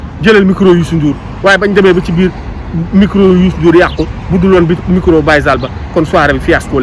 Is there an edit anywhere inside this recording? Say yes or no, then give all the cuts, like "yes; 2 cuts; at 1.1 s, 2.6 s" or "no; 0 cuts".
no; 0 cuts